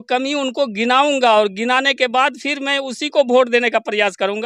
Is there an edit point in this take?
no; 0 cuts

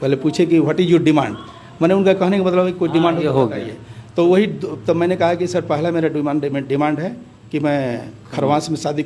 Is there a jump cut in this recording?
no; 0 cuts

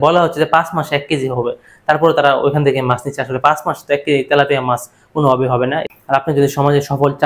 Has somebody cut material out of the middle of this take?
yes; 1 cut; at 5.8 s

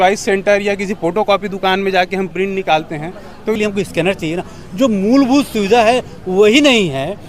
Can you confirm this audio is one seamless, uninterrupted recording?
no; 1 cut; at 3.6 s

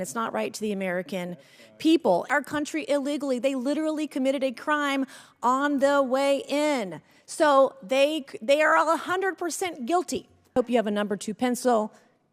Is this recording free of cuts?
no; 2 cuts; at 2.3 s, 10.6 s

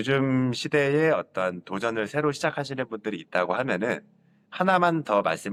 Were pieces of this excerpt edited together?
no; 0 cuts

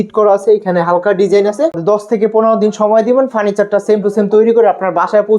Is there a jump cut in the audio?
yes; 1 cut; at 1.8 s

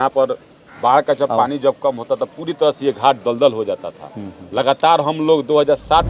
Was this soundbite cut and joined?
no; 0 cuts

